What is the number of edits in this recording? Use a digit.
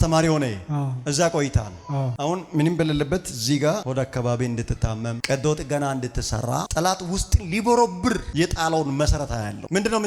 1